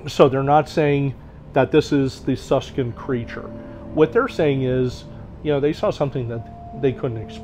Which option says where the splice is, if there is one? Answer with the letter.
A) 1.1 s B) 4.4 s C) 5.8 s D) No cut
D